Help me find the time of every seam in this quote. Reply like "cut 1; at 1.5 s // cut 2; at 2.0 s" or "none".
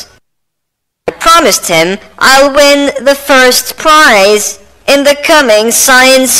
cut 1; at 1.1 s